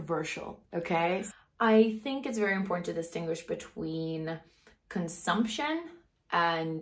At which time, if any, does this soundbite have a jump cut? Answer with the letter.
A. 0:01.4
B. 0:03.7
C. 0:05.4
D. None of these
A